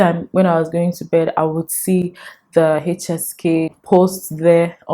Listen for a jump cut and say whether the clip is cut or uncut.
cut